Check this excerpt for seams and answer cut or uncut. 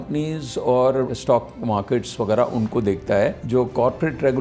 cut